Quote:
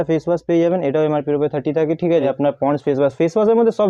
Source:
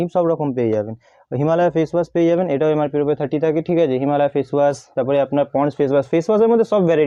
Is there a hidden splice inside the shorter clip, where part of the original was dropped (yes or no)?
yes